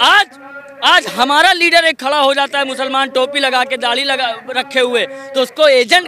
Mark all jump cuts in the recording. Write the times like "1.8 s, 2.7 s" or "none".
none